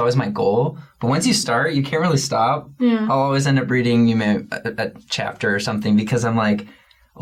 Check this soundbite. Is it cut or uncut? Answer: uncut